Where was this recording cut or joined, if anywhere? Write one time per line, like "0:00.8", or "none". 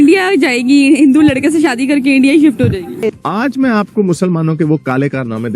0:02.9